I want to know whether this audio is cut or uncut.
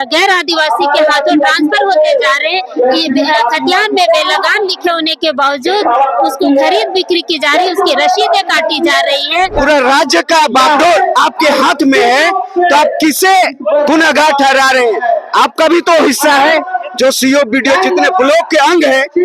cut